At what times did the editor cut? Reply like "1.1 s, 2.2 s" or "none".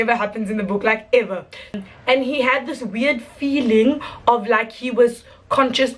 1.7 s